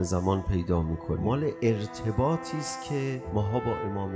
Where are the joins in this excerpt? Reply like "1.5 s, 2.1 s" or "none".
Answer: 1.5 s, 3.2 s